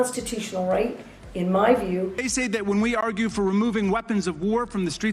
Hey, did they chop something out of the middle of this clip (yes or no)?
yes